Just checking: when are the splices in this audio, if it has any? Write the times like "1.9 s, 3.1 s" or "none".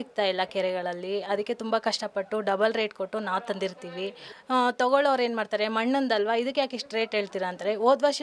4.3 s